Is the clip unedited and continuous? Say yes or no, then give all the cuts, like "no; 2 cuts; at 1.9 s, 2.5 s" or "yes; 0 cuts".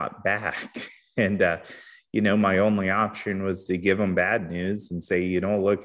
yes; 0 cuts